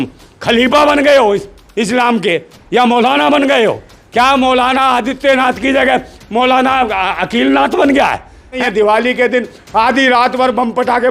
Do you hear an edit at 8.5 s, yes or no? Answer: yes